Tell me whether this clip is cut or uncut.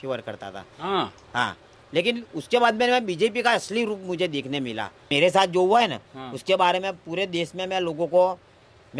cut